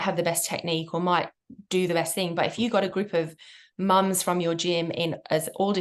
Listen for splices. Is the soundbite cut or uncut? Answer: uncut